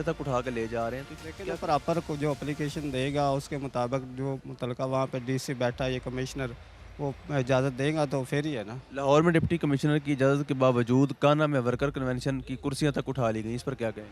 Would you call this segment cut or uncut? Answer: uncut